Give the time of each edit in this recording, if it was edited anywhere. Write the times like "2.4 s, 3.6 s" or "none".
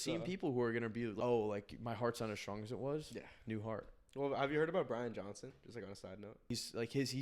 1.1 s, 6.5 s

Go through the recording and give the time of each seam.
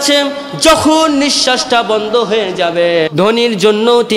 3.1 s

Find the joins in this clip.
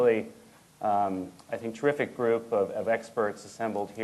none

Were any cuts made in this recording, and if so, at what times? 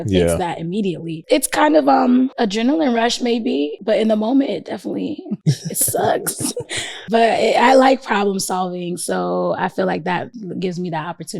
1.2 s, 2.3 s, 3.8 s, 5.3 s, 7.0 s, 10.4 s

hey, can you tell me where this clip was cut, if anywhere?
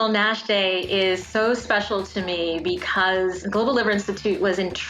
1.2 s, 3.4 s

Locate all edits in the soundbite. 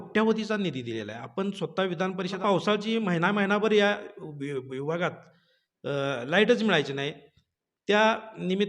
2.4 s

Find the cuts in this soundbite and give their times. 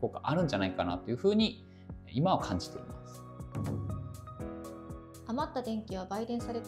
none

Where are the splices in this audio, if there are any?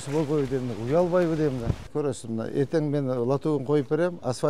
1.9 s

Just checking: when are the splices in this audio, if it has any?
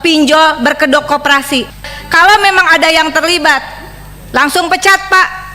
1.8 s

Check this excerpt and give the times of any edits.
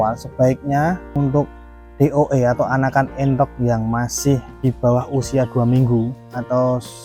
1.1 s, 4.5 s

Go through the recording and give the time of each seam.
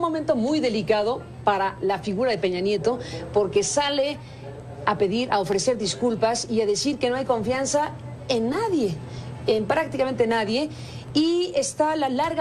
2.1 s

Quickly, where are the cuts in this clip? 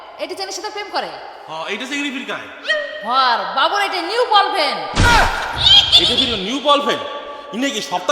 1.4 s

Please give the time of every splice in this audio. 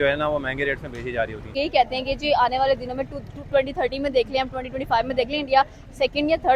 1.5 s

